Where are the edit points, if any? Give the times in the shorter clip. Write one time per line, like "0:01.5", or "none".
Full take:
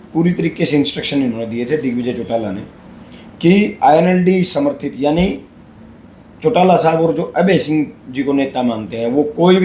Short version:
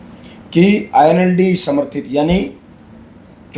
none